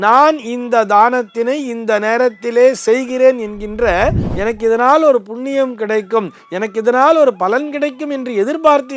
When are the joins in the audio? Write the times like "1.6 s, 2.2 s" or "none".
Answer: 4.2 s